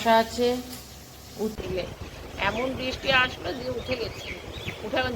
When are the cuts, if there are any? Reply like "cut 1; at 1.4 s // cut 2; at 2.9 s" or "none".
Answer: cut 1; at 1.6 s